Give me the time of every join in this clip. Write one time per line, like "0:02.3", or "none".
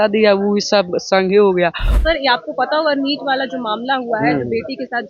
0:01.9